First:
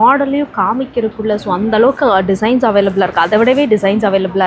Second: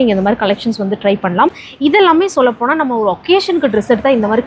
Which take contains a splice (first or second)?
second